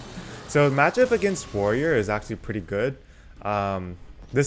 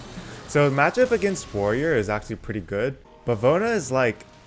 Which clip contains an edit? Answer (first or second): second